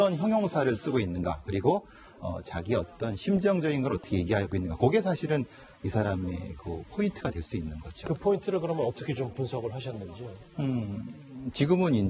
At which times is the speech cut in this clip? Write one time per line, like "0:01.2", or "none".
none